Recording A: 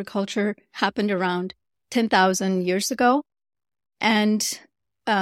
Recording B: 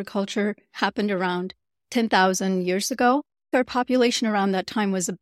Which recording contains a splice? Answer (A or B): B